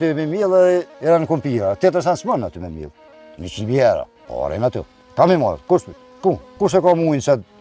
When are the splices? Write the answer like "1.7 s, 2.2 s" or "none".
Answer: 0.9 s, 4.2 s, 6.6 s